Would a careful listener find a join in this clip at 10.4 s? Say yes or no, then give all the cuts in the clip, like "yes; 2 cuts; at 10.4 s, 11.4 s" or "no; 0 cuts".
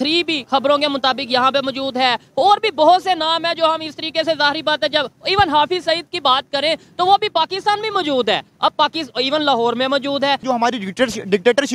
yes; 1 cut; at 10.4 s